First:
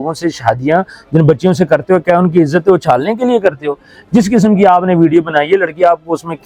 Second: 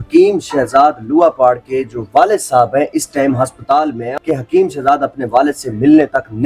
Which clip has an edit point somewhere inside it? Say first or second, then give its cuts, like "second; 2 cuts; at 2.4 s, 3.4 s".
second; 1 cut; at 4.0 s